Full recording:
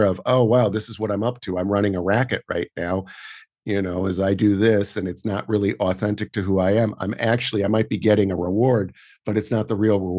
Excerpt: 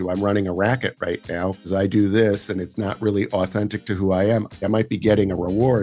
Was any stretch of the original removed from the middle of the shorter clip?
yes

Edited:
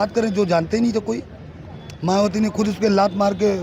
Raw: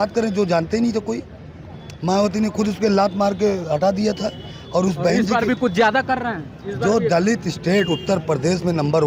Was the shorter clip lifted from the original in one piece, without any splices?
yes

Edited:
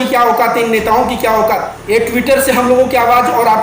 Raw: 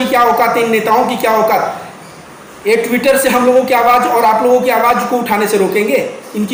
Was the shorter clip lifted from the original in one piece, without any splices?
no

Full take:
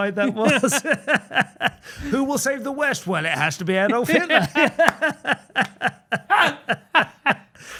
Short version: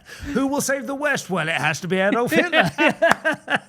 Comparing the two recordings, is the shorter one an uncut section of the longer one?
yes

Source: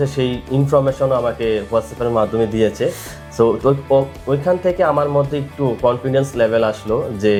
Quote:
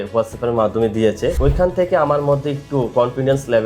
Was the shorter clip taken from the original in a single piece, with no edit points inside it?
no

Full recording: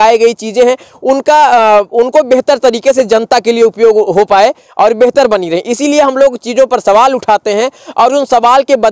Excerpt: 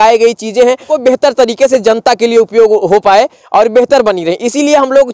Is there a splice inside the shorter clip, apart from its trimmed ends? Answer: yes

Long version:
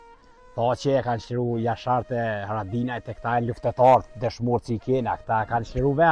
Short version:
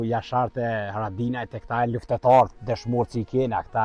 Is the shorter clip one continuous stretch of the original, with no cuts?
yes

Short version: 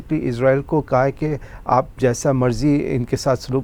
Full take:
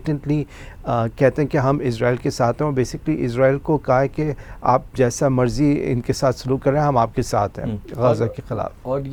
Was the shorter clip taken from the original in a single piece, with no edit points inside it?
yes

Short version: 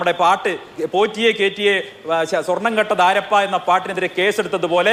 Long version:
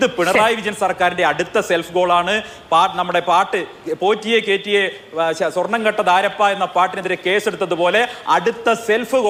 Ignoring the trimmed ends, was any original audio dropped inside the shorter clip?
no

